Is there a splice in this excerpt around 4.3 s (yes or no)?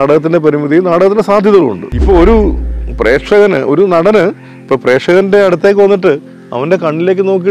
no